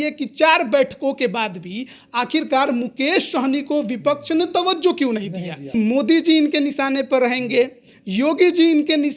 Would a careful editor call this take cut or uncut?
cut